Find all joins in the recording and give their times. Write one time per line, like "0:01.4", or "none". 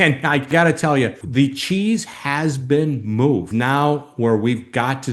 0:01.2
0:03.5